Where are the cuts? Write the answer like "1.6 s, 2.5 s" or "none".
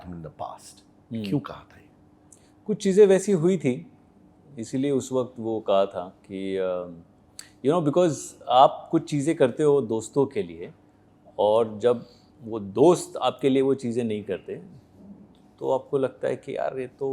none